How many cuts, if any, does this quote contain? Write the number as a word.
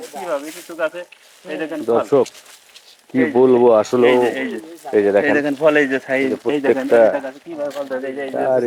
zero